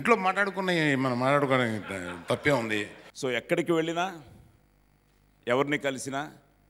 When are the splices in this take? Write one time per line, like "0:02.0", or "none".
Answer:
0:03.0